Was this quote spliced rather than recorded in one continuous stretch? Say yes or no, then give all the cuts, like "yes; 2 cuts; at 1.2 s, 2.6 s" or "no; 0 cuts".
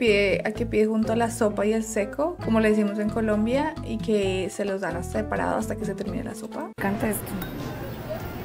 no; 0 cuts